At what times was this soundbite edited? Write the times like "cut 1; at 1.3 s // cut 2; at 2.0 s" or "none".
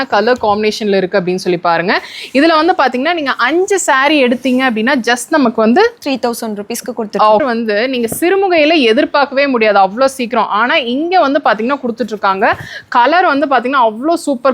cut 1; at 7.4 s